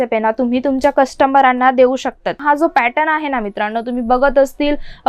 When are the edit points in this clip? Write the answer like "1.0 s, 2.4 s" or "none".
2.4 s